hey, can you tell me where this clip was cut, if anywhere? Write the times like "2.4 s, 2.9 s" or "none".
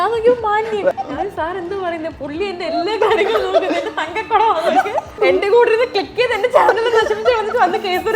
0.9 s, 5.2 s